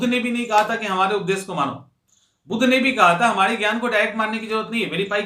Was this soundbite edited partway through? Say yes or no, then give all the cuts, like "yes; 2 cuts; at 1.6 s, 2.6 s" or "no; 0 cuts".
no; 0 cuts